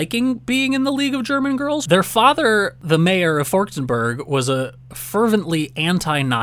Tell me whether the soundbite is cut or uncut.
cut